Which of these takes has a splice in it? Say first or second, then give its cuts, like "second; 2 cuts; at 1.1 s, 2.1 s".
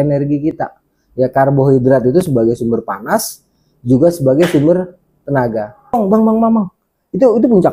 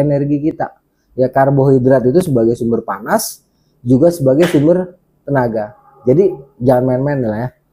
first; 1 cut; at 6.0 s